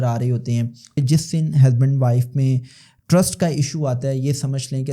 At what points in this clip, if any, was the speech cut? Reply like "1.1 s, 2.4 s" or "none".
1.0 s